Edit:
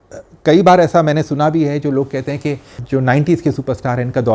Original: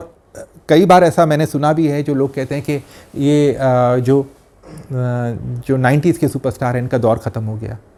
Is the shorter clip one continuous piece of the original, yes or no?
no